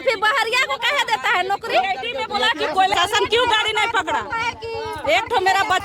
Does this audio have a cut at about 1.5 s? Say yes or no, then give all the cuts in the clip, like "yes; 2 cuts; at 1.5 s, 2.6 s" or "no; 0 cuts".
no; 1 cut; at 2.9 s